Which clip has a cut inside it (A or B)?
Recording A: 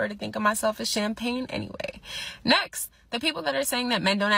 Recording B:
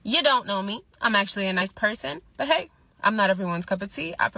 A